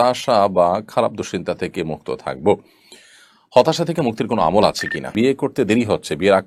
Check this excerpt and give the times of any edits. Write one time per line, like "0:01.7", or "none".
0:05.1